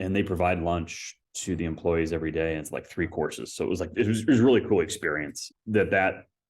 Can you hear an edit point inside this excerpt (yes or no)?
yes